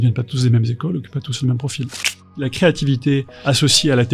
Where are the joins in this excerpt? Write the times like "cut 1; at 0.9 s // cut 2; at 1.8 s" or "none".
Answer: cut 1; at 2.4 s // cut 2; at 3.3 s